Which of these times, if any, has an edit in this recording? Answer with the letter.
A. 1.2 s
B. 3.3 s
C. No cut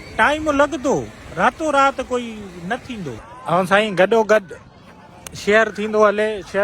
B